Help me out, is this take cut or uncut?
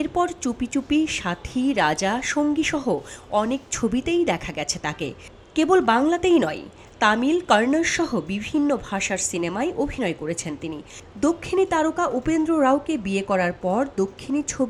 uncut